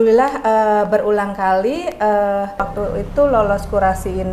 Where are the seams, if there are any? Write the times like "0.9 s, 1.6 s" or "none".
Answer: 2.7 s